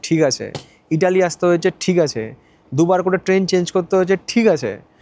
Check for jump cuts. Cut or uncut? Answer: uncut